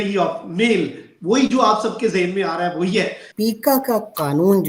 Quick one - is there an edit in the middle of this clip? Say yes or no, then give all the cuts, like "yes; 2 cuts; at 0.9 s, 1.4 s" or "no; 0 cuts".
yes; 1 cut; at 3.3 s